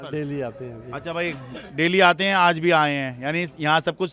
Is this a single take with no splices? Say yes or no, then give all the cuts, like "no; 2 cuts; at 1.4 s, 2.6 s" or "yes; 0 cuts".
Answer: yes; 0 cuts